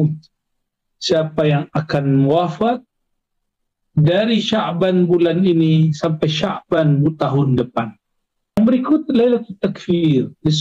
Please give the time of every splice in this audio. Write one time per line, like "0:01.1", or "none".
0:08.6